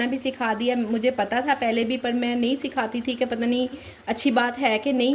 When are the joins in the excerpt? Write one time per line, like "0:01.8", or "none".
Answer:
none